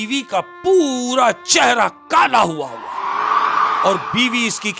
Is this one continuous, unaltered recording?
no; 1 cut; at 3.8 s

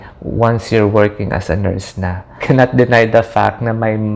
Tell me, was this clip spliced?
yes; 1 cut; at 2.4 s

